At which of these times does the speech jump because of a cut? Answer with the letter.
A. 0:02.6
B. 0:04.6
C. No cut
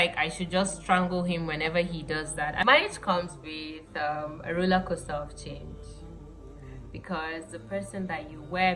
A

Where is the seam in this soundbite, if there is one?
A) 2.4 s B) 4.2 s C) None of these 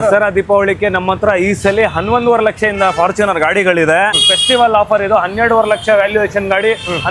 B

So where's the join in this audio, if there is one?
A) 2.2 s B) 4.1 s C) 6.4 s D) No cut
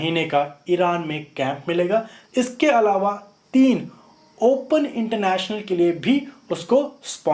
A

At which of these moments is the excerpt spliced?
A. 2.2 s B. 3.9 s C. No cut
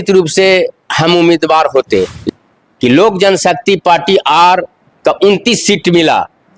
A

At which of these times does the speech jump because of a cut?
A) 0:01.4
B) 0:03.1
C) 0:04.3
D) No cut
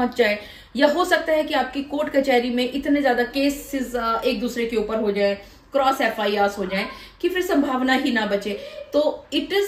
D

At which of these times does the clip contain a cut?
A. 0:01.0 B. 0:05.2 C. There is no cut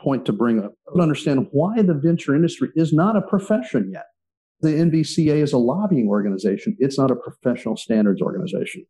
A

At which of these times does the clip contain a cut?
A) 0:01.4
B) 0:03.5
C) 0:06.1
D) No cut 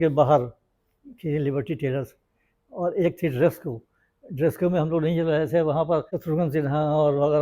C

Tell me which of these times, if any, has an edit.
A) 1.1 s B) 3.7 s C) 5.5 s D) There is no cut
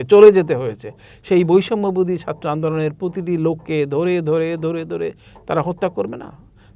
D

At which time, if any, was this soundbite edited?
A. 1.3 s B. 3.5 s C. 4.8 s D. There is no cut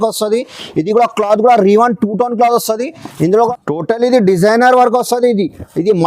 B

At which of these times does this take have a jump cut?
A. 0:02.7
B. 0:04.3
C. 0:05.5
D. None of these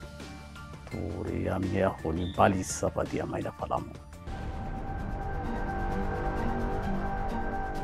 B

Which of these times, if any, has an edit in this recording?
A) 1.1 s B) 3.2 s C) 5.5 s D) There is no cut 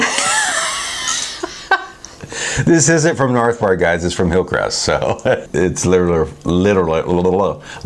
C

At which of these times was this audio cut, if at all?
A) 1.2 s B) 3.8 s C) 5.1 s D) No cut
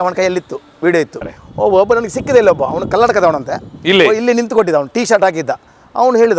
A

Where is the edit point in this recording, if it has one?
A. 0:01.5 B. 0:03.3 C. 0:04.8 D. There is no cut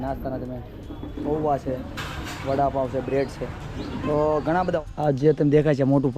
C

